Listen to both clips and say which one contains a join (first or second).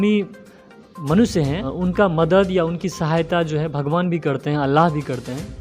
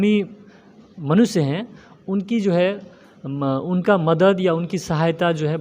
first